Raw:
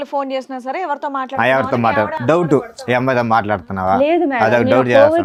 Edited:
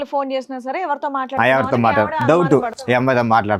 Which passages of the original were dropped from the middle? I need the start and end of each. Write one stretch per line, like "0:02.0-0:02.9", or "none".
none